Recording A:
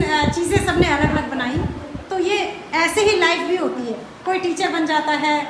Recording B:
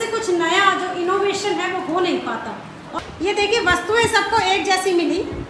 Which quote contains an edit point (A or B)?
B